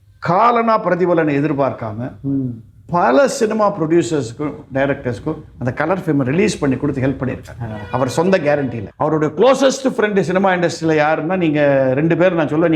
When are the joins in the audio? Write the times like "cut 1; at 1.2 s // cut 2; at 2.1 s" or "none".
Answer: cut 1; at 8.8 s